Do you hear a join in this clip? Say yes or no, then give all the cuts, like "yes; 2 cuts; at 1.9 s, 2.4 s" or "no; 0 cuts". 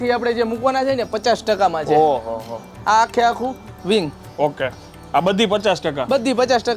no; 0 cuts